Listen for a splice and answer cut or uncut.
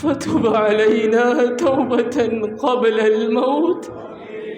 uncut